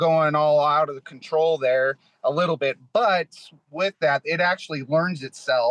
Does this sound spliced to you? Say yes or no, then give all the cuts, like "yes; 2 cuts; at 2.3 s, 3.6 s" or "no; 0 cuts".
no; 0 cuts